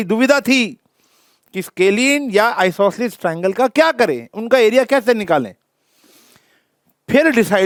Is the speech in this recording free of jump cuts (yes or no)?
yes